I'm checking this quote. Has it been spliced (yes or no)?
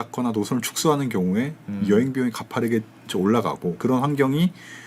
yes